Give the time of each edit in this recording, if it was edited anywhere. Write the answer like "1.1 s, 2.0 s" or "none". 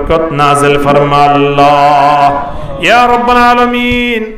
none

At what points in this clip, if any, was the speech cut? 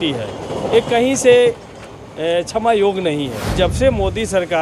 3.5 s

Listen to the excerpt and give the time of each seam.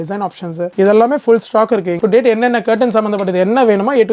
2.0 s

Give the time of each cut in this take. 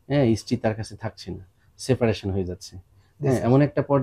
none

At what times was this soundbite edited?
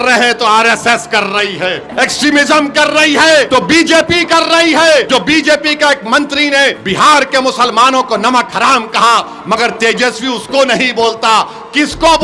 1.9 s, 3.5 s, 5.1 s, 6.8 s

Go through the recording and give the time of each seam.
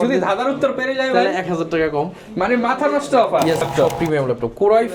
3.7 s

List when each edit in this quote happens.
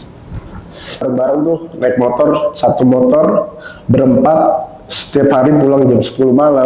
1.0 s

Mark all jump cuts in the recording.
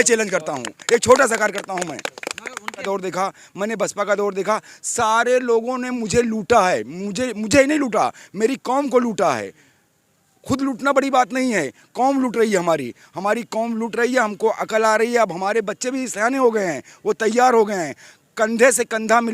2.8 s

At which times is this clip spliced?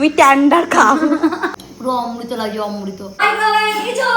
1.6 s, 3.2 s

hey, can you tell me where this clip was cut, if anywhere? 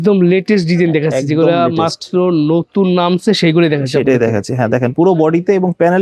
none

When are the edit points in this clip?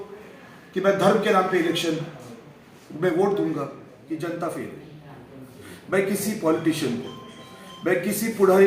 3.9 s

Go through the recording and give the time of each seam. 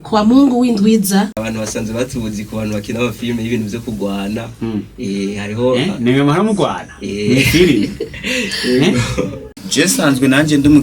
1.4 s, 9.6 s

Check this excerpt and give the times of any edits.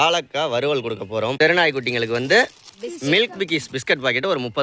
1.4 s

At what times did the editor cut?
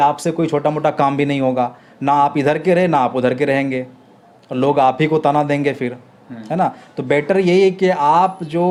none

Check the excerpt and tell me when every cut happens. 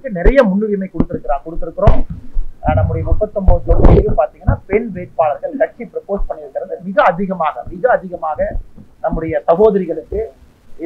none

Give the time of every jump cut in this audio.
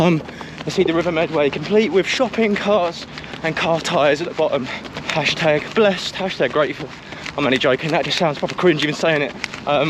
none

